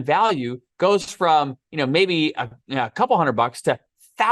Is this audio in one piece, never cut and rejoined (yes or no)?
yes